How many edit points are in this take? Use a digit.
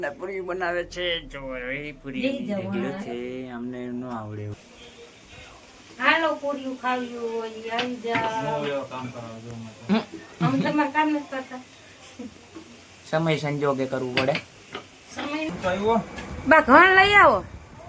2